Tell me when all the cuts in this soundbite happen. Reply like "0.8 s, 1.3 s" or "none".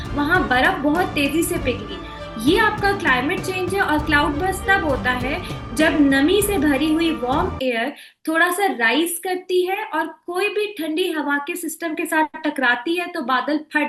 none